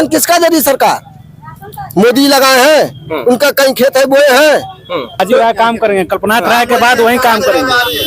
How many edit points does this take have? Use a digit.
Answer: 1